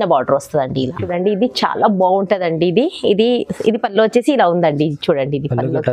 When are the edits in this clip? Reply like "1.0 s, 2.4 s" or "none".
1.0 s